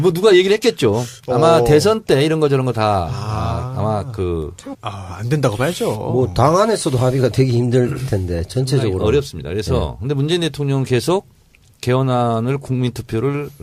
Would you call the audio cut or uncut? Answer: uncut